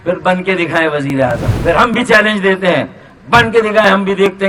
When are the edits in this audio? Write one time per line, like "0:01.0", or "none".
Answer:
0:01.5